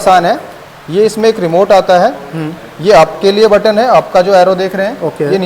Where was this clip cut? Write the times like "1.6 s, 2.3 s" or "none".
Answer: none